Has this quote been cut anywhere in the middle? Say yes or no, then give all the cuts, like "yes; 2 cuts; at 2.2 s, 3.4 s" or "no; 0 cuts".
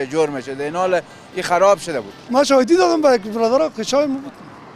yes; 1 cut; at 2.2 s